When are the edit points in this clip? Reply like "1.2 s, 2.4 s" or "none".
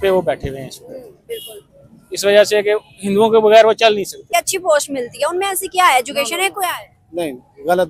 4.2 s